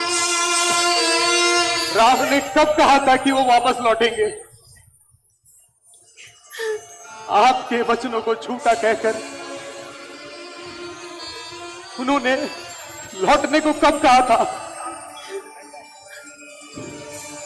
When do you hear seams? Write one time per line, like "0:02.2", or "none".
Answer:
none

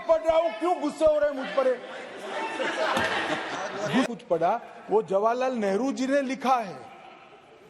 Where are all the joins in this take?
0:04.1

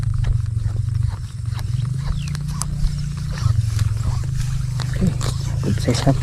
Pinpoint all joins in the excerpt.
none

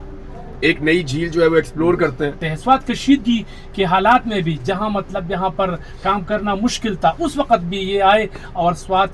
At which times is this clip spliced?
0:02.5

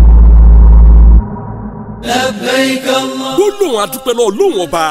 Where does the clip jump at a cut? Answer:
0:01.9

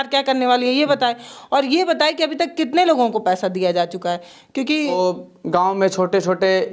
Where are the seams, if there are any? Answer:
0:04.9

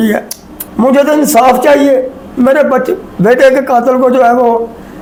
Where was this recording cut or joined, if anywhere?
none

